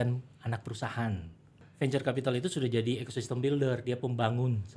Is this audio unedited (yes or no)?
no